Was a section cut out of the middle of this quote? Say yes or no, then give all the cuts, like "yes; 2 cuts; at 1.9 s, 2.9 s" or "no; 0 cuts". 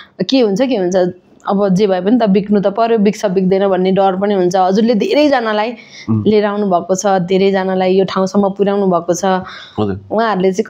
no; 0 cuts